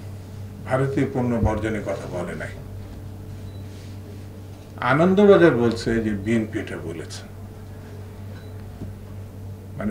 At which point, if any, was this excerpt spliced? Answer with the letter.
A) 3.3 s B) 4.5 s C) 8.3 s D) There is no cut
D